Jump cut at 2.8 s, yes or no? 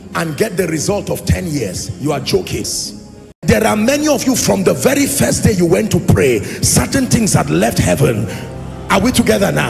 yes